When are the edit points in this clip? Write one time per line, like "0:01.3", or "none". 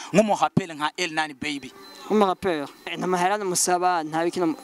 0:03.0